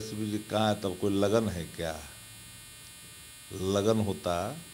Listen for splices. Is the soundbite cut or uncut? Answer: uncut